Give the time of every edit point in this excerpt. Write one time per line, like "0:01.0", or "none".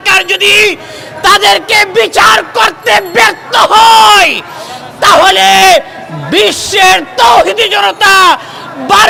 none

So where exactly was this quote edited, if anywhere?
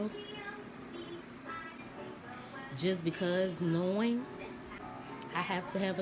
0:01.8
0:04.8

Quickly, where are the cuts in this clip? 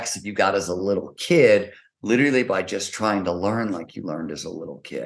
none

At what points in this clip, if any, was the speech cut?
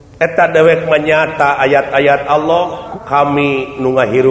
0:02.9

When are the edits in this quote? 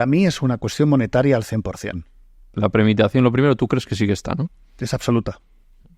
0:02.6

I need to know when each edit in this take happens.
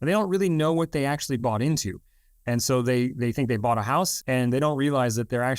0:04.2

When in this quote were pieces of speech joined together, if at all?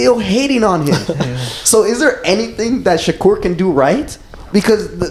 none

